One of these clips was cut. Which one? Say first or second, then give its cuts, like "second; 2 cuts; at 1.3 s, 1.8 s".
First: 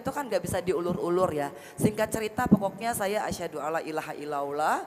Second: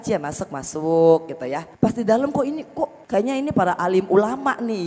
second; 2 cuts; at 1.7 s, 3.0 s